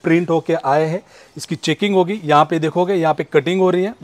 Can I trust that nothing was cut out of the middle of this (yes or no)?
yes